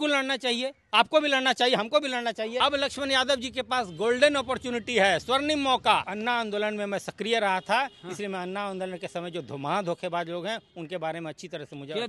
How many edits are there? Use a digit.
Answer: 2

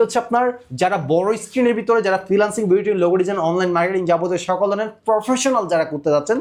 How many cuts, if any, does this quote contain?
0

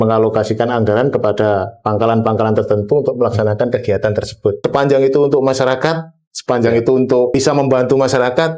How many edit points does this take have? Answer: 2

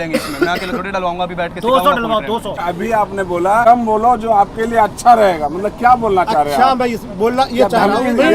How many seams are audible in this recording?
2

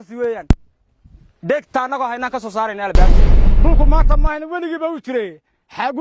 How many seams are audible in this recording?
1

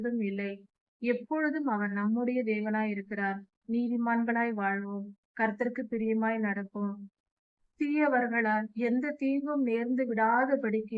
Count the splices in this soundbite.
1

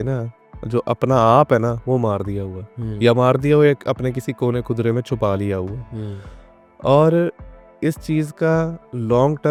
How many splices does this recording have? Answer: 0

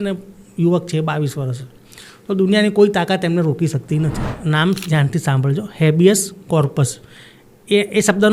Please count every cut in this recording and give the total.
1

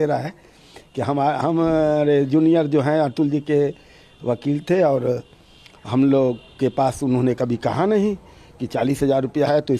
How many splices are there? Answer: 0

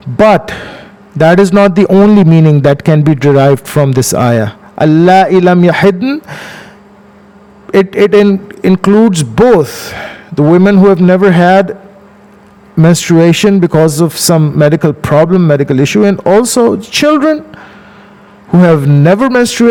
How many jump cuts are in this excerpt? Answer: 0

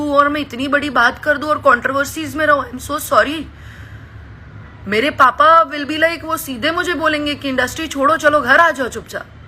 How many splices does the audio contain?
0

